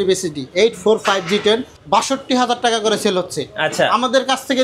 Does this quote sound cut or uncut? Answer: cut